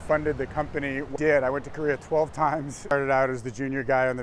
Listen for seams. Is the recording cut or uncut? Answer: cut